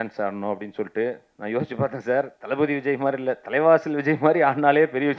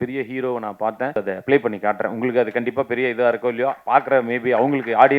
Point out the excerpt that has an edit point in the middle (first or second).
second